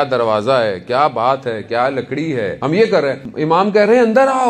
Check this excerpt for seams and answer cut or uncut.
cut